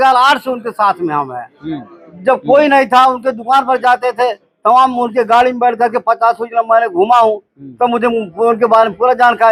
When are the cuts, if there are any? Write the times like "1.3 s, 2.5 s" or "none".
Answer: none